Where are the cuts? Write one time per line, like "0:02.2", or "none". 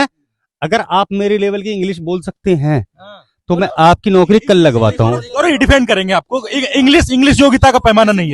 none